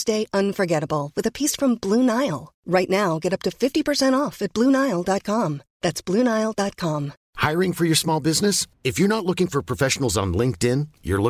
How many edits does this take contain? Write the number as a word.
one